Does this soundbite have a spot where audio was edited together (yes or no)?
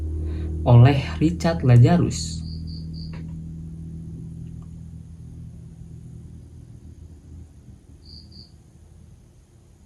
no